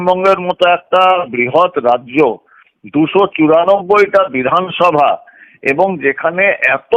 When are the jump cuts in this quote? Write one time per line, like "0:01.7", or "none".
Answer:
none